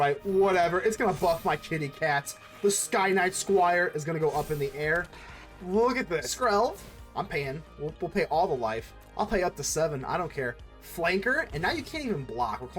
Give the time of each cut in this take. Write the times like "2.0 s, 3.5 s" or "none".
6.3 s